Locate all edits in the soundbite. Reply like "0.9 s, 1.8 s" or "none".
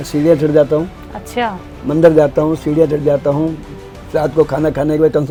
none